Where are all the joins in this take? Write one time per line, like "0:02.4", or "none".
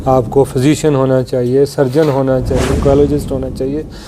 0:02.6

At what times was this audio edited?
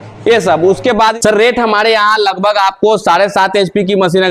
0:01.1

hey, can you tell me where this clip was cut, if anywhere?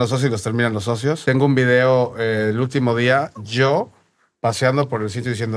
0:01.2

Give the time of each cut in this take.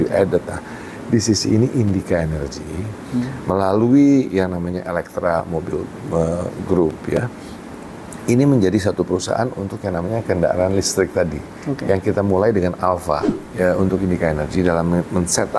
0:13.4

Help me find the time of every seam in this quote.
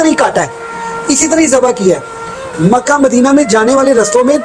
none

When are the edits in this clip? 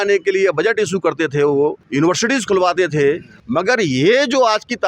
0:01.8
0:03.3

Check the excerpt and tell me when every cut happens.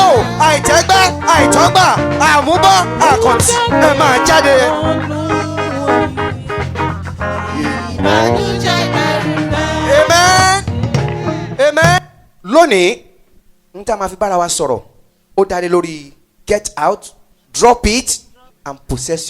0:12.0

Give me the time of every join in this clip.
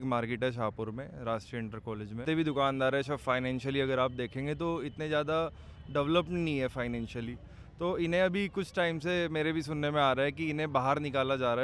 0:02.2

